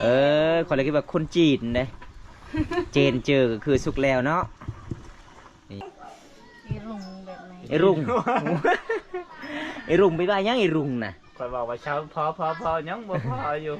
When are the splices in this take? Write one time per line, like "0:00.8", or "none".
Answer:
0:05.8

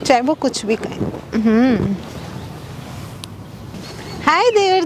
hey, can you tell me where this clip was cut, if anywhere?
0:03.8

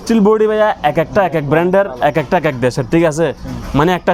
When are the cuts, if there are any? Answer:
none

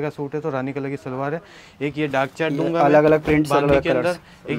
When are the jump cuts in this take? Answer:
none

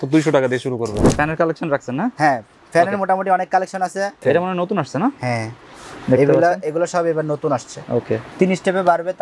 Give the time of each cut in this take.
0:01.1
0:04.2
0:08.2

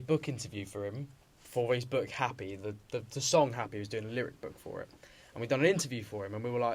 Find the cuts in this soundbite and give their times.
none

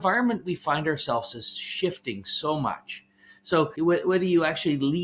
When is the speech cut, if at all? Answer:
0:03.7

